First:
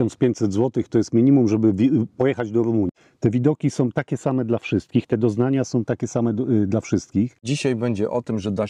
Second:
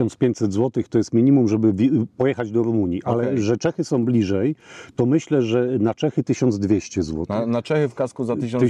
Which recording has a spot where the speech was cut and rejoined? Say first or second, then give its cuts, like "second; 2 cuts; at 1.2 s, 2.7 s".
first; 2 cuts; at 2.9 s, 7.4 s